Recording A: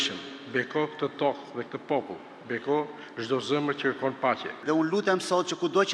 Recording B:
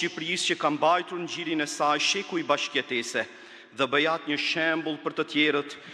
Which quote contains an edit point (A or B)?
A